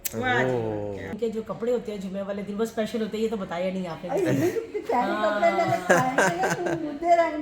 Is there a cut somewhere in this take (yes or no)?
yes